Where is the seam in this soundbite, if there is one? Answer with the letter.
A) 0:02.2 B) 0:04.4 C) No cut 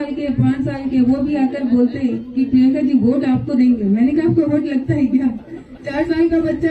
C